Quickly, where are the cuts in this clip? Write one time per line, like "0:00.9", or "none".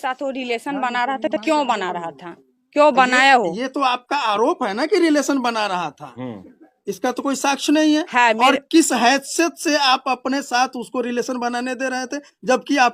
none